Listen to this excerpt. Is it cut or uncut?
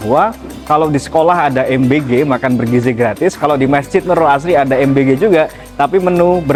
uncut